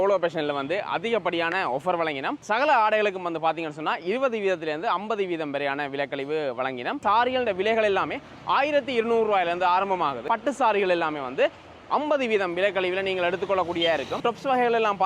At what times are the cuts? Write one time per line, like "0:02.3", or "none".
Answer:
0:07.0
0:10.2
0:14.1